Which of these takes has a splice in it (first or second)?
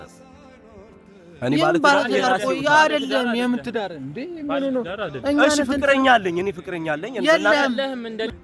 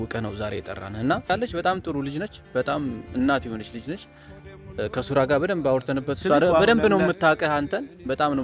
second